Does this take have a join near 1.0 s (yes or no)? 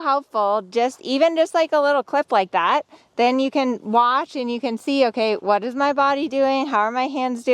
no